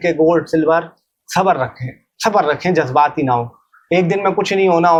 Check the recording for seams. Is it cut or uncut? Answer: uncut